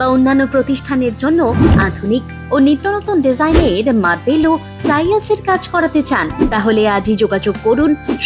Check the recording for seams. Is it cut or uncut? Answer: uncut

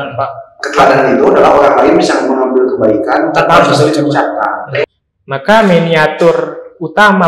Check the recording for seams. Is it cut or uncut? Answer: cut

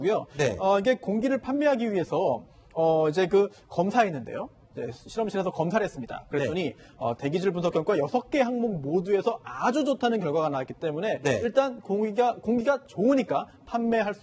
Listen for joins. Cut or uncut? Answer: cut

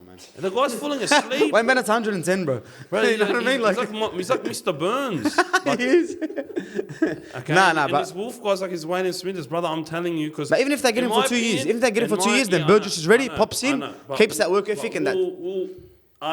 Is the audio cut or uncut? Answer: uncut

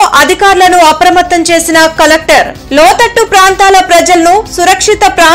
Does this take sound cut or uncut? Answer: uncut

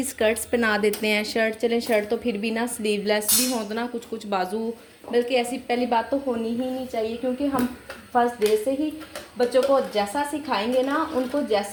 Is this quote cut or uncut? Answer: uncut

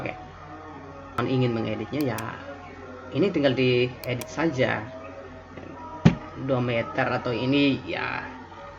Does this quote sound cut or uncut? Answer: cut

